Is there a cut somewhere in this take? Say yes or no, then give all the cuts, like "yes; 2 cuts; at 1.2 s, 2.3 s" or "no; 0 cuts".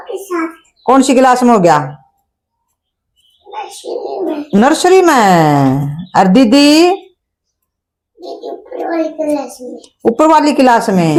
no; 0 cuts